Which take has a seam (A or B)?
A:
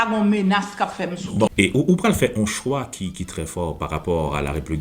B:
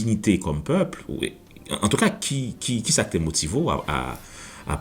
A